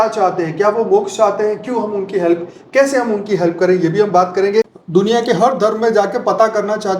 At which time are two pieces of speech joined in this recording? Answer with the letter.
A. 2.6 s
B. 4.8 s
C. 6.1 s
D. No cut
B